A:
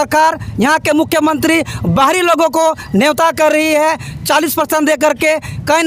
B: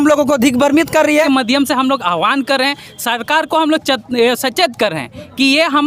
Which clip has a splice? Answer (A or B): B